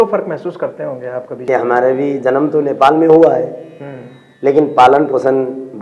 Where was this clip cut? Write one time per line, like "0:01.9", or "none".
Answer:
0:01.5